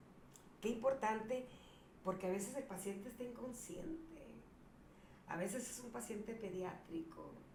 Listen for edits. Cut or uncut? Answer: uncut